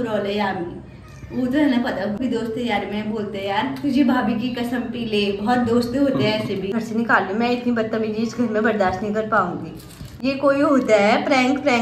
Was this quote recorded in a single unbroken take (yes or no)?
no